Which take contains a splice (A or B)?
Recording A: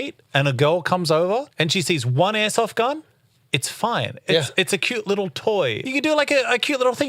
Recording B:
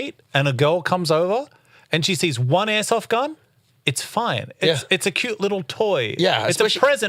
A